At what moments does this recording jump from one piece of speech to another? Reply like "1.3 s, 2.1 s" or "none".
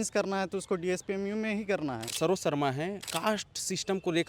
2.0 s, 3.1 s